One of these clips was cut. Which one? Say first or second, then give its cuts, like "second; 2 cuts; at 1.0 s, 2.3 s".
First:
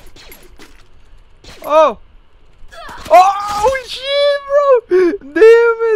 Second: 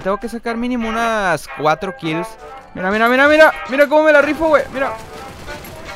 second; 1 cut; at 2.5 s